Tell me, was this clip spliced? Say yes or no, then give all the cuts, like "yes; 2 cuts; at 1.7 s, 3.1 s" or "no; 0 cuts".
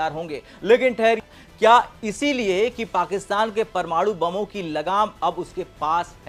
no; 0 cuts